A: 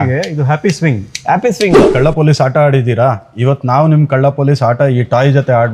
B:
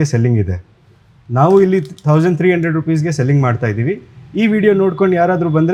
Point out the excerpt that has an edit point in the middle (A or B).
A